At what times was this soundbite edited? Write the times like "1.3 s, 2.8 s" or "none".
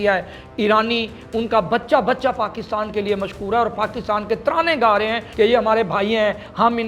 5.2 s